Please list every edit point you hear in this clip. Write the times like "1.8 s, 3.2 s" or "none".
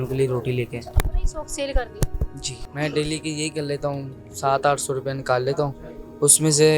2.6 s